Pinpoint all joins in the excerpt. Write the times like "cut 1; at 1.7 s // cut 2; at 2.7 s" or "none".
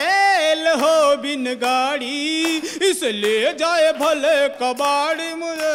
none